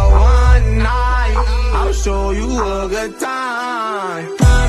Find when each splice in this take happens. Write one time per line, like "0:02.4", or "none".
none